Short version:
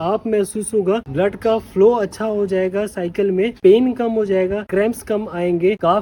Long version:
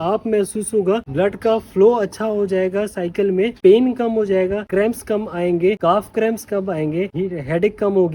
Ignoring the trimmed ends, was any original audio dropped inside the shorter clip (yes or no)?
no